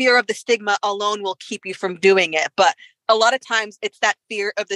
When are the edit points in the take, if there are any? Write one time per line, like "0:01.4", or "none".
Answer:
none